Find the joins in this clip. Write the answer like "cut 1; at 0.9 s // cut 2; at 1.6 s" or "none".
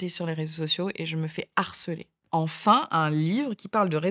cut 1; at 2.2 s